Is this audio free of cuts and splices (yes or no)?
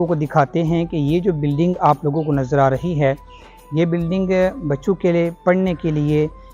yes